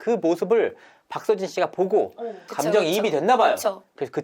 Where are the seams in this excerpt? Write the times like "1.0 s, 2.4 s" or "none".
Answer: 2.4 s